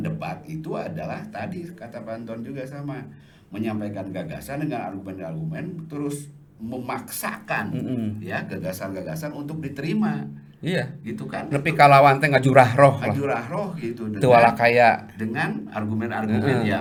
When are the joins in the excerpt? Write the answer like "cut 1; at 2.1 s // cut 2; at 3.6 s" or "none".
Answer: none